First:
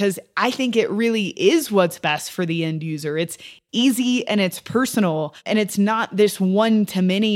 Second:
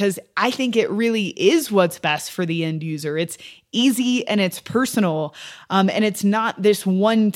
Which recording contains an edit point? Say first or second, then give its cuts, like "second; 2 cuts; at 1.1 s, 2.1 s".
first; 1 cut; at 5.5 s